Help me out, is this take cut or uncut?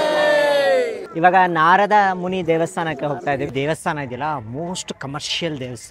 cut